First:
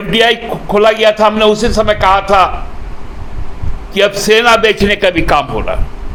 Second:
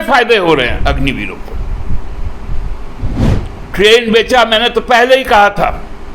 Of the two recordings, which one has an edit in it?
second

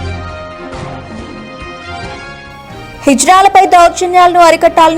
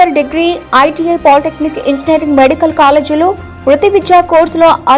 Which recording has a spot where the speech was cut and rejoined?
first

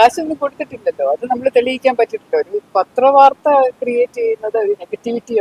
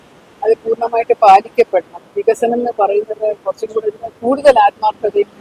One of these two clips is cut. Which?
second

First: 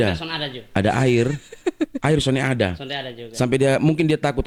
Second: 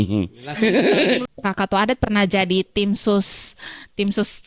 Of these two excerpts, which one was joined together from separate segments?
second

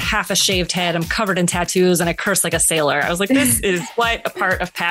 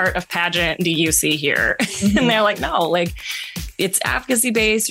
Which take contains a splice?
second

